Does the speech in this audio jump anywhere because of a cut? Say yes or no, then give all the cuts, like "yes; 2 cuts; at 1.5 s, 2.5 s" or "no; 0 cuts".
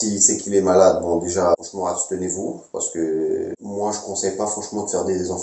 no; 0 cuts